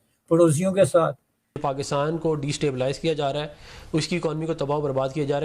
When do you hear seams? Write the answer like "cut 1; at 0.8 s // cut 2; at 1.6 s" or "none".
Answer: cut 1; at 1.6 s